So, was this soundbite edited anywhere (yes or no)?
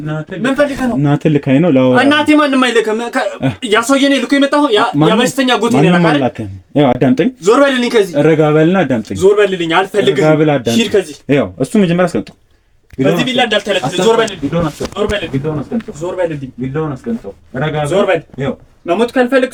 no